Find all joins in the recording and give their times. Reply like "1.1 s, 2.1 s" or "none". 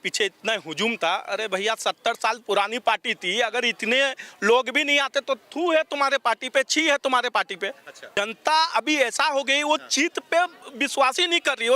8.0 s